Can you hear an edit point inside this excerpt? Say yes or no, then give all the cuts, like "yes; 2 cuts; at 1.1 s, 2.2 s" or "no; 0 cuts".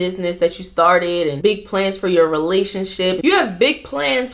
yes; 2 cuts; at 1.3 s, 3.2 s